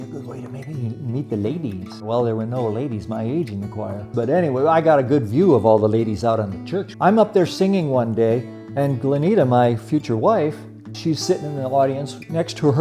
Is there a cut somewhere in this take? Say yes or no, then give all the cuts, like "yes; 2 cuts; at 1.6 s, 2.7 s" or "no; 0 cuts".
yes; 4 cuts; at 2.0 s, 4.1 s, 6.9 s, 10.9 s